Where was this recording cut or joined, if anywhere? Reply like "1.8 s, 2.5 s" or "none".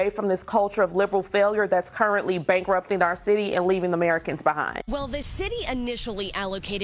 4.7 s